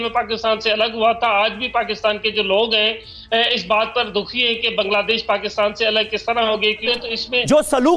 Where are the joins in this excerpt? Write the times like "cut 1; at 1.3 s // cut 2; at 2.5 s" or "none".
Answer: cut 1; at 6.9 s